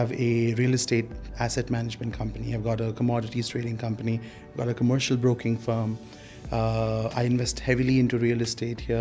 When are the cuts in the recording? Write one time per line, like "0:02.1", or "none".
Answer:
none

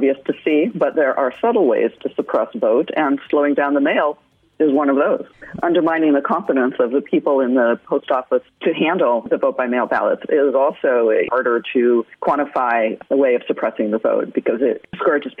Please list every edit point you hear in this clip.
none

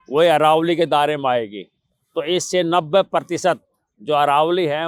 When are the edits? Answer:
none

